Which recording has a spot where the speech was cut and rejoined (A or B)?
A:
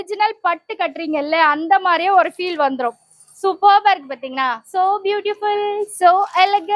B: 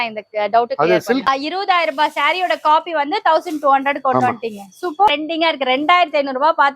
B